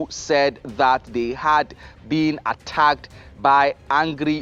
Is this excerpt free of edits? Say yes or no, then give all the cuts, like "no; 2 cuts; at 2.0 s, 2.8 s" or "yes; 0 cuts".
yes; 0 cuts